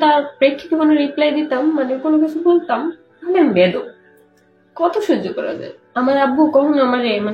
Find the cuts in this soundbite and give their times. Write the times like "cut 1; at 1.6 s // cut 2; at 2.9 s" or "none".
cut 1; at 5.7 s